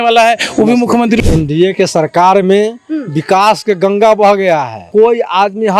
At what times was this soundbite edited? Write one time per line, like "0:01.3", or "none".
0:01.2
0:04.8